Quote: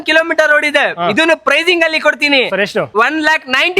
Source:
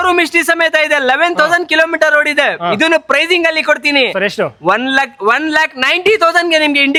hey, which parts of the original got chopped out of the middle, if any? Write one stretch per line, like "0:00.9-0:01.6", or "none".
0:04.5-0:05.2